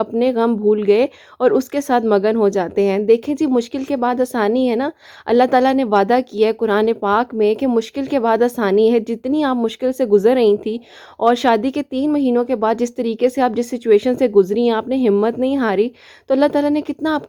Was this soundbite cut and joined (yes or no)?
no